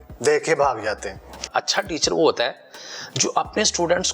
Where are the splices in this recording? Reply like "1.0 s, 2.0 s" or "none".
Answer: 1.4 s